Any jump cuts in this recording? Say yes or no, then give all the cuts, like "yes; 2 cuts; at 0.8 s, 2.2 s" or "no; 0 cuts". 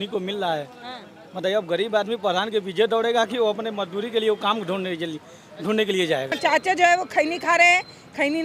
yes; 1 cut; at 6.4 s